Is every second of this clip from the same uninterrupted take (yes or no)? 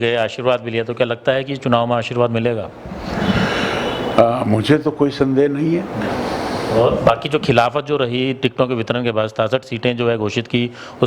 yes